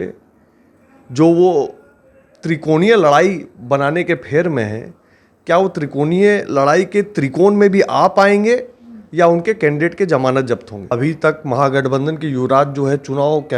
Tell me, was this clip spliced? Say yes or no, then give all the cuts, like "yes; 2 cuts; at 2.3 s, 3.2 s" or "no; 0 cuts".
yes; 1 cut; at 10.7 s